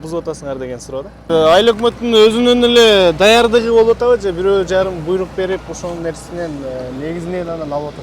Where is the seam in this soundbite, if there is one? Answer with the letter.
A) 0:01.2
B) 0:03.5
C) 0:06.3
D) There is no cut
A